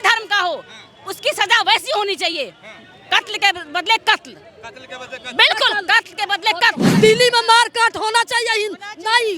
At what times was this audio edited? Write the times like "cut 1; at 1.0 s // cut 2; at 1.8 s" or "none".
cut 1; at 6.9 s